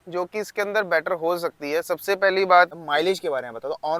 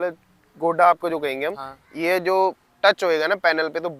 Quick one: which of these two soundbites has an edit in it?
first; 1 cut; at 2.7 s

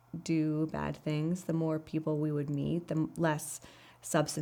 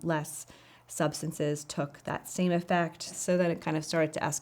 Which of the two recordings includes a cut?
second; 1 cut; at 3.1 s

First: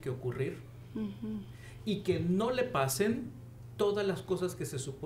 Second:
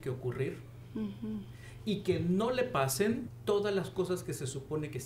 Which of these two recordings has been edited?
second; 1 cut; at 3.3 s

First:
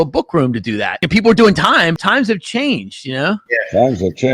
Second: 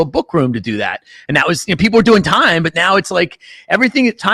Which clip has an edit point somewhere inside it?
first; 2 cuts; at 1.0 s, 2.0 s

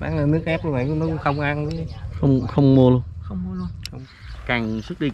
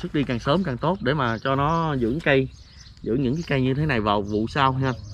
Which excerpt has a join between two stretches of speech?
first; 1 cut; at 3.9 s

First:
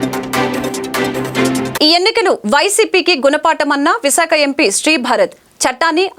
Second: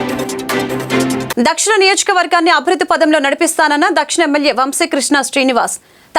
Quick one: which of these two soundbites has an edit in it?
second; 1 cut; at 1.3 s

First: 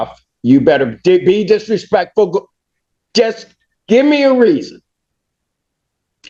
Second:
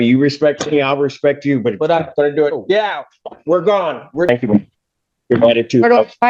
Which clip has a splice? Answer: second; 1 cut; at 4.3 s

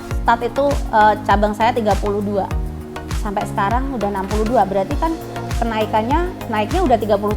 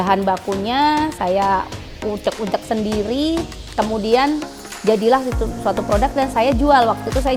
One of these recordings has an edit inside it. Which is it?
first; 1 cut; at 6.4 s

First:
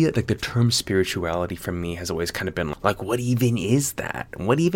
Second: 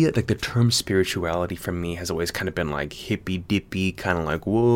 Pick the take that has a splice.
first; 1 cut; at 2.7 s

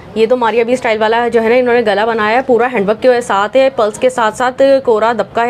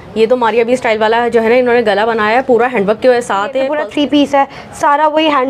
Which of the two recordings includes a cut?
second; 1 cut; at 3.7 s

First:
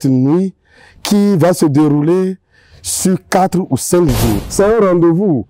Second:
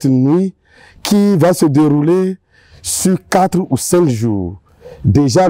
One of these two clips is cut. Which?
first; 1 cut; at 4.4 s

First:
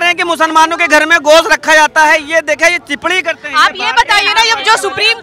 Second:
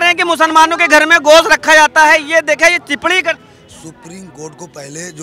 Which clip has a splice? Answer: second; 1 cut; at 3.4 s

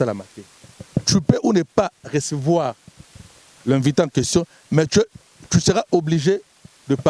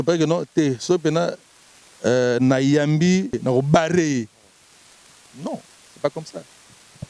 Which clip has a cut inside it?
second; 1 cut; at 3.4 s

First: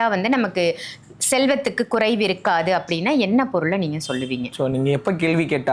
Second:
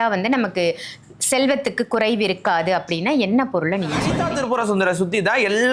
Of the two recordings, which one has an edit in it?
second; 1 cut; at 4.2 s

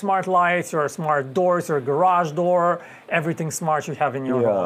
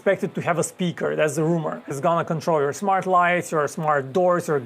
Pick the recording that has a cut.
second; 1 cut; at 1.9 s

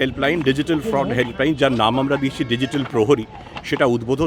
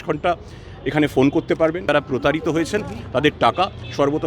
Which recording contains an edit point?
second; 1 cut; at 1.8 s

